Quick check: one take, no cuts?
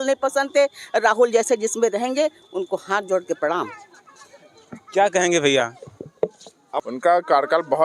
yes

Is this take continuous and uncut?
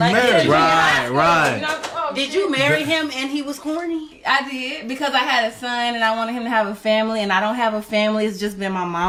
yes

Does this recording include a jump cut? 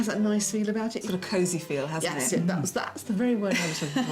yes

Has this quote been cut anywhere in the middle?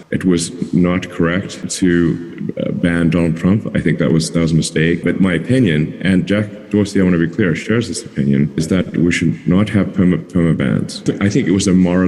yes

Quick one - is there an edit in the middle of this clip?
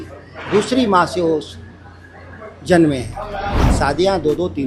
yes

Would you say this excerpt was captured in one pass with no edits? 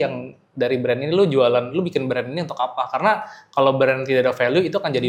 yes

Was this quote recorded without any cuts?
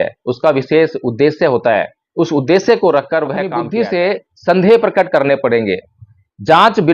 no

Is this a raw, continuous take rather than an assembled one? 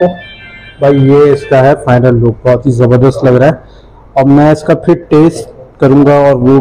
yes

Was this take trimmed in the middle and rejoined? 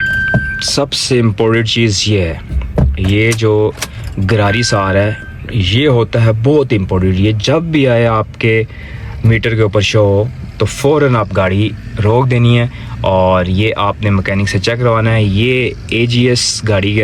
no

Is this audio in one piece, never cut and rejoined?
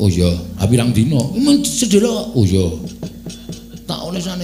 yes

